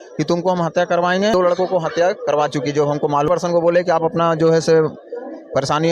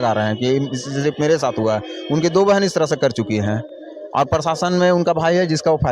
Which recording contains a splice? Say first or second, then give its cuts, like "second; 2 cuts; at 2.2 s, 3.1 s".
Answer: first; 2 cuts; at 1.3 s, 3.3 s